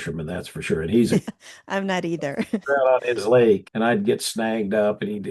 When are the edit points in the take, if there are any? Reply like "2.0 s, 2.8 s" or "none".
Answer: 1.3 s, 3.7 s

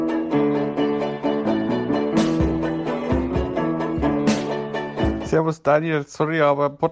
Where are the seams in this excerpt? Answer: 4.7 s

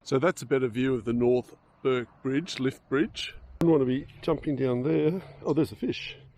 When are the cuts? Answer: 3.6 s

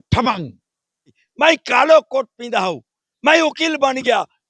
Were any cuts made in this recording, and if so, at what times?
1.2 s

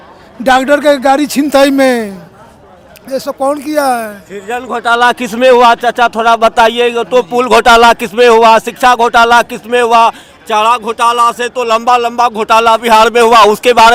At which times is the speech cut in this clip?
none

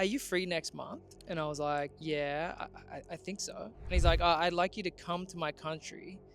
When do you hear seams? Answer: 1.1 s, 2.0 s

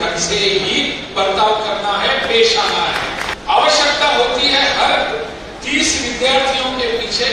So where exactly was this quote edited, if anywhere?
3.3 s

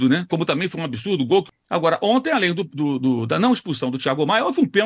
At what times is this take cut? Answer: 1.5 s

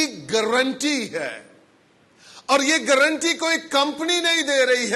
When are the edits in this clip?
none

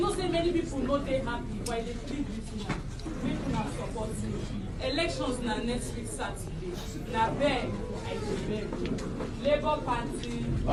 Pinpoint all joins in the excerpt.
none

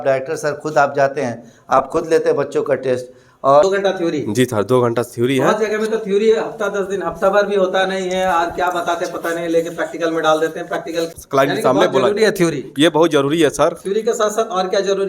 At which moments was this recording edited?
3.6 s, 11.1 s

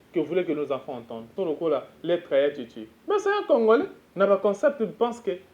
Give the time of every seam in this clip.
1.3 s, 4.0 s

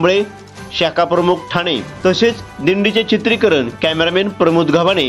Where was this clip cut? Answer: 1.8 s

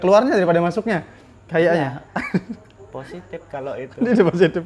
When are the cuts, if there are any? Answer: none

